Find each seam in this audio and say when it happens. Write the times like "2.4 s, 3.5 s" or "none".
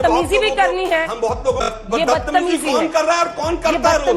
1.7 s